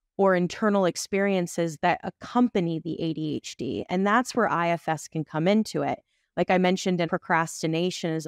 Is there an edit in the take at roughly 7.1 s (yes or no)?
yes